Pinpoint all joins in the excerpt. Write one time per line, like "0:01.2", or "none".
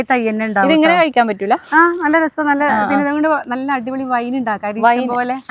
none